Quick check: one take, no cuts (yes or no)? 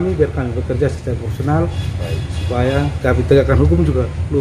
yes